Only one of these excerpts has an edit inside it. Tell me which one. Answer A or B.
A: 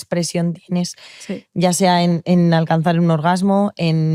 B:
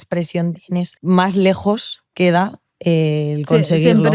B